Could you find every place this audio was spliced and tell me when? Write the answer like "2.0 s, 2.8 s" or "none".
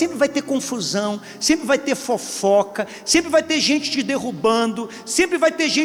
none

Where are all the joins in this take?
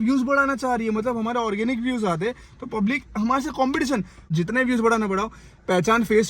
4.3 s

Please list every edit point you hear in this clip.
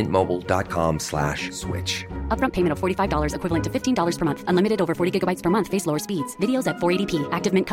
none

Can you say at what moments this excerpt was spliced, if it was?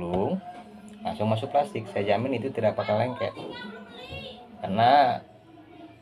4.5 s

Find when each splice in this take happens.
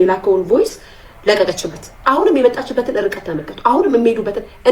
2.0 s

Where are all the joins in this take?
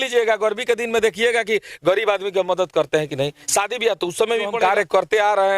4.5 s

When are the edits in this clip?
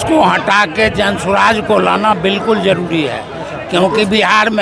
none

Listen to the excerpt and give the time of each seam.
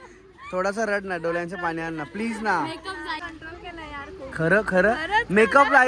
3.2 s

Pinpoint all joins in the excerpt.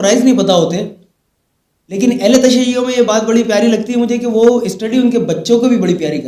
none

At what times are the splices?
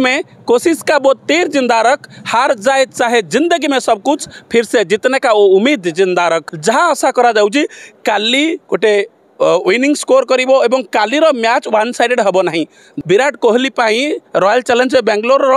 6.5 s, 12.9 s

